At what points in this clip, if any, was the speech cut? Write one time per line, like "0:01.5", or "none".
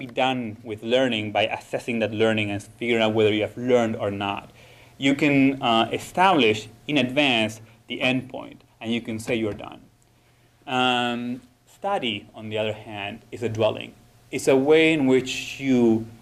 0:04.3